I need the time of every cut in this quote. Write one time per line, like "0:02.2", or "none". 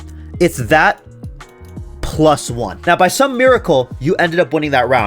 0:02.8